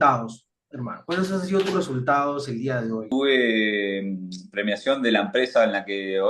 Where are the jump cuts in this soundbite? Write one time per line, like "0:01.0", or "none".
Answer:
0:03.1